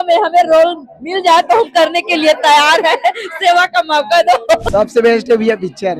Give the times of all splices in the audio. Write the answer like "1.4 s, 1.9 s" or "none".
4.6 s